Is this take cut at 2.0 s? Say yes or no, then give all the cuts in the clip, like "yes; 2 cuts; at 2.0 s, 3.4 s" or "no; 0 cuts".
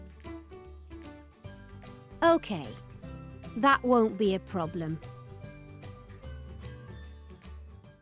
no; 0 cuts